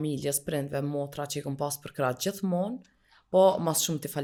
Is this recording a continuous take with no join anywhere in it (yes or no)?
yes